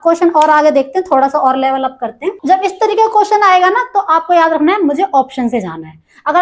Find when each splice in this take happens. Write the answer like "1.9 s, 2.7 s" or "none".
2.4 s